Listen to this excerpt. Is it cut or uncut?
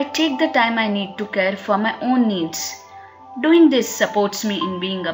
uncut